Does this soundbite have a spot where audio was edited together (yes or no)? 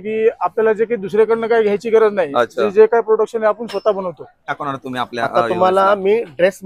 yes